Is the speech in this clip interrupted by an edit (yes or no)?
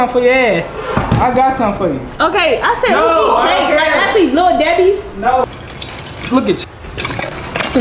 yes